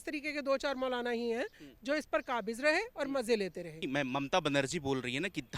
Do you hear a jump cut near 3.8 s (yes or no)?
yes